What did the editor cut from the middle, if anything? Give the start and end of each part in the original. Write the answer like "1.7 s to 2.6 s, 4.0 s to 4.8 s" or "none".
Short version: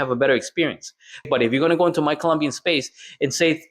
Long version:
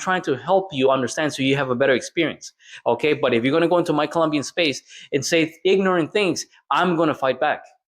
2.8 s to 3.2 s

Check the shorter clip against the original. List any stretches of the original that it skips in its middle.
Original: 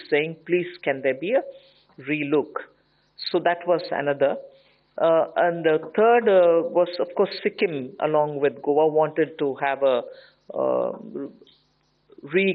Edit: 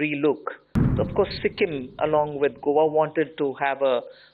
3.0 s to 6.9 s

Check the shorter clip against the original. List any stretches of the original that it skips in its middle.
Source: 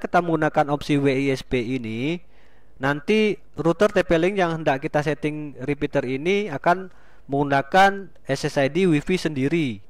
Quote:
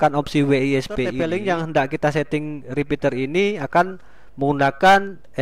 1.7 s to 4.1 s

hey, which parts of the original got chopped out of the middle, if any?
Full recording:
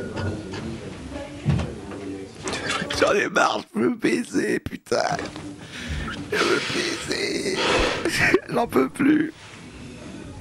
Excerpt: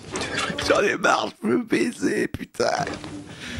none

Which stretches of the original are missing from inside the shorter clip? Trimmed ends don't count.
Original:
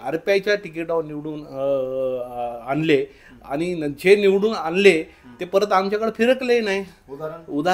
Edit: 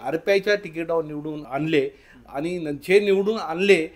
1.4 s to 2.6 s

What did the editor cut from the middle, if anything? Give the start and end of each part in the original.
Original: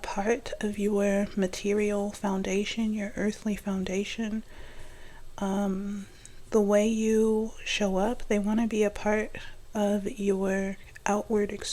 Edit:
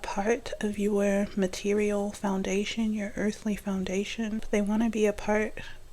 4.4 s to 8.2 s

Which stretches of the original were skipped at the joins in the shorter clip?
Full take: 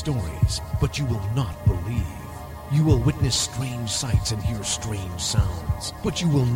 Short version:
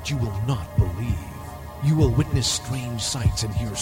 none

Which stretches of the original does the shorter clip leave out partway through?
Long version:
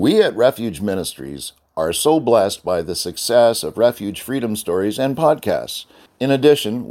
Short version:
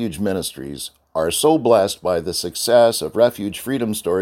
none

